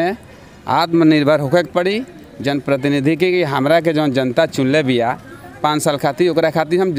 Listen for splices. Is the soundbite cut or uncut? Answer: uncut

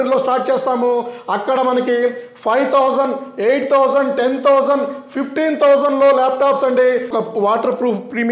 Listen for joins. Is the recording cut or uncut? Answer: cut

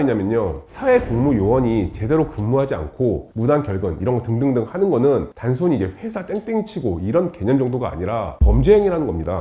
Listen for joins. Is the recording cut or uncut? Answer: uncut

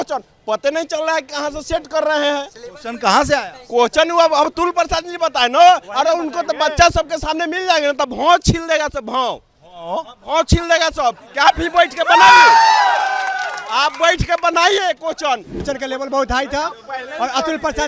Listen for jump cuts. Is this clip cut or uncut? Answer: cut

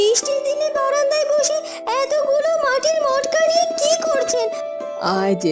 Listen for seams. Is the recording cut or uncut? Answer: uncut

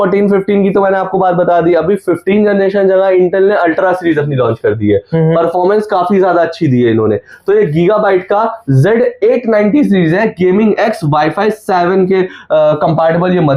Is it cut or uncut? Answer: uncut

